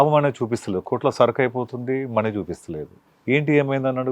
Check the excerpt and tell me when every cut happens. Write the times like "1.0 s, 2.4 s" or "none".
3.1 s